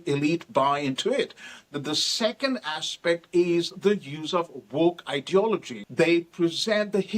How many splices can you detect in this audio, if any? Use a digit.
1